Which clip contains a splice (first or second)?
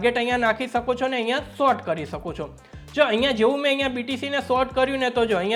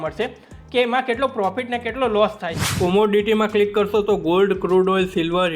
second